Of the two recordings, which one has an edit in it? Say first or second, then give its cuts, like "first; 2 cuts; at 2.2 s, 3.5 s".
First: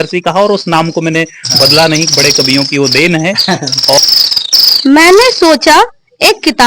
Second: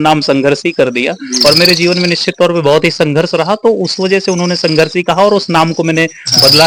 first; 1 cut; at 4.0 s